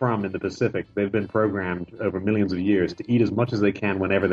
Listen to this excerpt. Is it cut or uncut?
uncut